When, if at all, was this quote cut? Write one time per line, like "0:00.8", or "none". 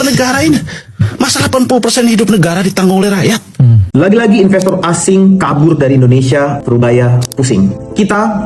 0:03.8